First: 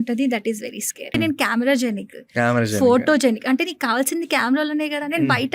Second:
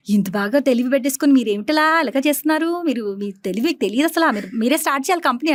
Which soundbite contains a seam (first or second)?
first